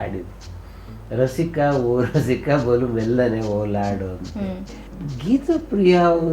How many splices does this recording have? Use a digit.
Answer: 1